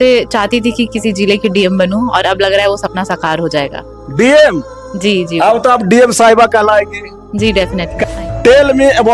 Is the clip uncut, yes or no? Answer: no